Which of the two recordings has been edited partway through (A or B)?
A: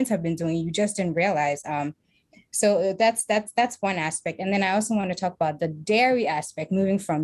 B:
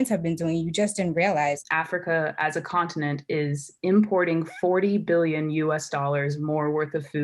B